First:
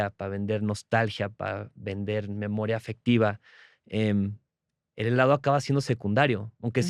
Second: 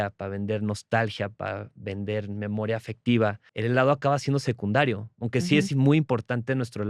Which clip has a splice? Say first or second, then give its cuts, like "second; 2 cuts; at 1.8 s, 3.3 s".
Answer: second; 1 cut; at 3.5 s